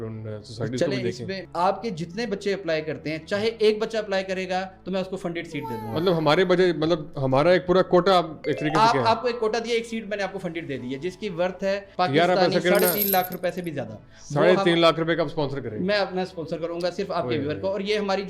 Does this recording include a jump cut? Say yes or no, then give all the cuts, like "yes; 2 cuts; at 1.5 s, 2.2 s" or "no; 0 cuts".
yes; 1 cut; at 1.4 s